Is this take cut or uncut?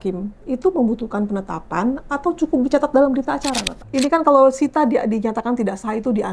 cut